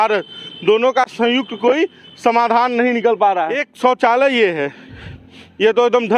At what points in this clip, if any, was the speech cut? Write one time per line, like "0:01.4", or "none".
0:03.7